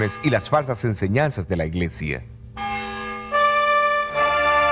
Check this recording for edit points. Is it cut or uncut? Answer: uncut